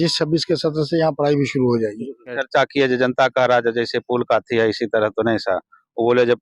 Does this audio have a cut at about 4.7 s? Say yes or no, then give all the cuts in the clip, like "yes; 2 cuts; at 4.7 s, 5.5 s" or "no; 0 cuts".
no; 1 cut; at 2.4 s